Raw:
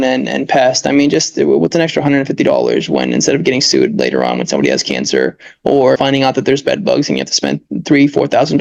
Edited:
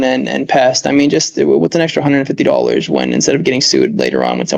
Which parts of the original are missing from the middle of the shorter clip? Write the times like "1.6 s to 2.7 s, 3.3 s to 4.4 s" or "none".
none